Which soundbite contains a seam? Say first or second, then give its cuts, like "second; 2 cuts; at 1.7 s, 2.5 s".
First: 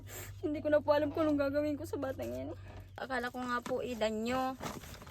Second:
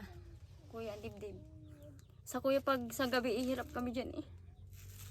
first; 1 cut; at 3.0 s